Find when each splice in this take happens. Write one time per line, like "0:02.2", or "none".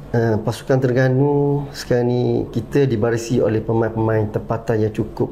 none